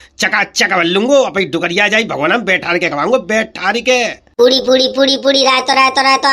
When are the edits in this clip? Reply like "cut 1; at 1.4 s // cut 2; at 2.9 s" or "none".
cut 1; at 4.2 s